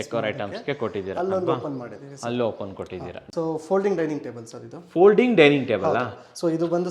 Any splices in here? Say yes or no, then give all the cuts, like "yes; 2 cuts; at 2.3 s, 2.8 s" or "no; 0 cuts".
yes; 1 cut; at 3.2 s